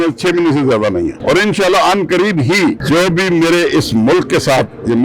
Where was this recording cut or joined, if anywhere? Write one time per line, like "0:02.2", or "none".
0:01.2
0:02.8